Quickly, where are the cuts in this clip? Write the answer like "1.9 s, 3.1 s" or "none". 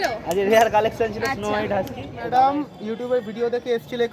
2.1 s